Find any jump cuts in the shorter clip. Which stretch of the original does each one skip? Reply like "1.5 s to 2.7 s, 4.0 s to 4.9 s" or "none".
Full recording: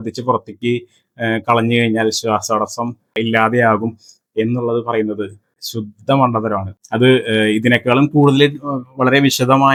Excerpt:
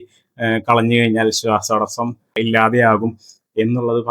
none